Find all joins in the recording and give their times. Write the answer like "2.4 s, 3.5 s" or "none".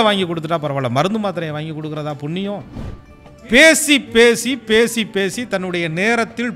2.8 s